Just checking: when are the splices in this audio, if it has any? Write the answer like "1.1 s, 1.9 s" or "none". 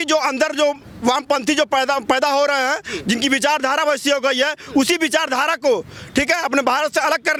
none